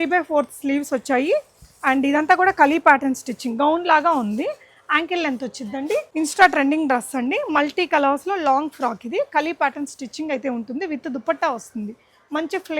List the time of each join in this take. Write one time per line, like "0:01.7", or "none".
0:06.1